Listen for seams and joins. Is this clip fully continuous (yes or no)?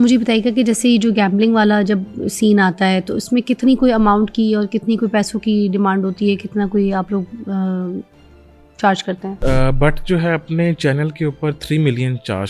no